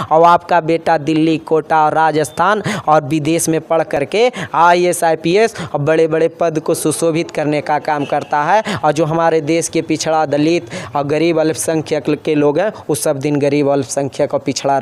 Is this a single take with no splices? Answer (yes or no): yes